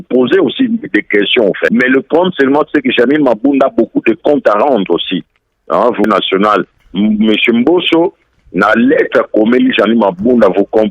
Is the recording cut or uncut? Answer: cut